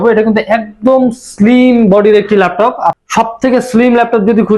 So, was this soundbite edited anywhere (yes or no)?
yes